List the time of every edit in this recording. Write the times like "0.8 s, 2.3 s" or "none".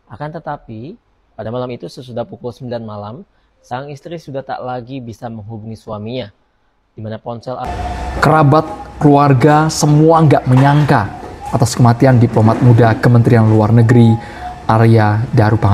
7.7 s